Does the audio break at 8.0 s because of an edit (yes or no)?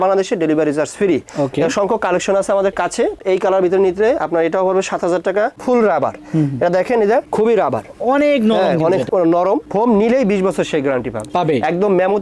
no